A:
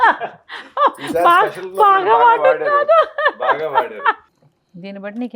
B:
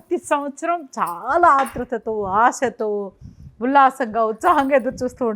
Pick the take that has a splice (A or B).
A